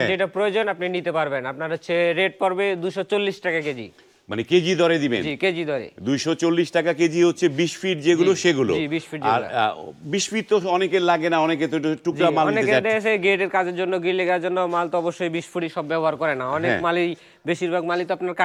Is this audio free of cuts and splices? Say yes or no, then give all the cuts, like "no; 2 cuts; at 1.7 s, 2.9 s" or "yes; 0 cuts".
yes; 0 cuts